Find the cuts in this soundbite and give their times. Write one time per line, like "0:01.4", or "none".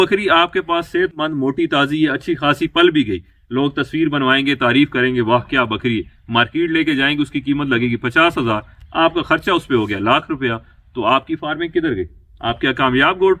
none